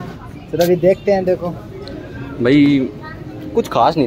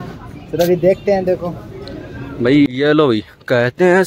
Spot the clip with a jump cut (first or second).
second